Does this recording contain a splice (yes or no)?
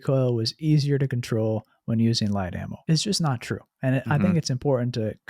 yes